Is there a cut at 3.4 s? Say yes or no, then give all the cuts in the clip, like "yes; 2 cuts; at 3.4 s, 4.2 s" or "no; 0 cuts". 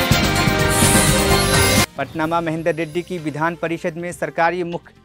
no; 1 cut; at 1.9 s